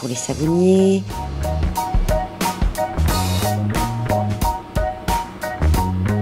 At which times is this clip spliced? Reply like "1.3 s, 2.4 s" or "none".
1.7 s